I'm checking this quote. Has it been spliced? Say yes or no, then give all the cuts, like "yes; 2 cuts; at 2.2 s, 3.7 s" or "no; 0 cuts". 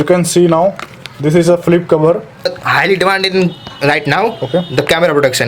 yes; 1 cut; at 2.6 s